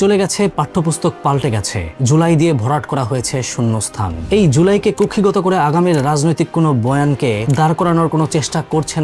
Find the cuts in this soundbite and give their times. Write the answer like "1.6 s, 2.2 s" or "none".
none